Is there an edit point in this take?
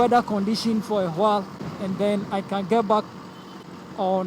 yes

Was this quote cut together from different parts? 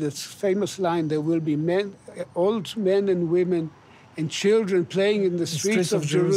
no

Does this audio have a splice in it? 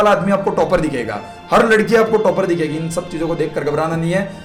no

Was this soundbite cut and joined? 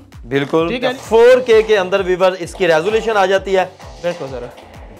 yes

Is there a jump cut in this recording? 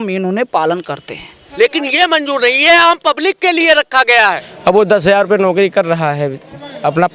yes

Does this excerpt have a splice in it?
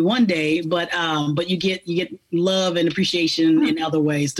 no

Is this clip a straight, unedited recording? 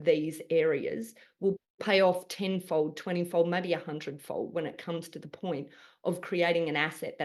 yes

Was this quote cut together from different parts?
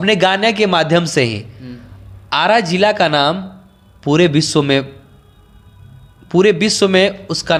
no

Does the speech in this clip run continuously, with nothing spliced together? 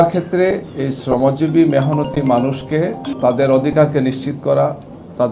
no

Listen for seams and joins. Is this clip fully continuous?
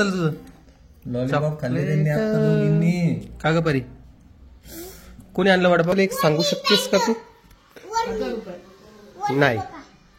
no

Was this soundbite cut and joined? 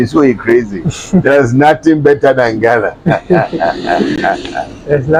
no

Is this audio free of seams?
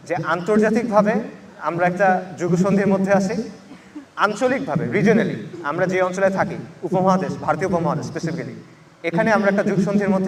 yes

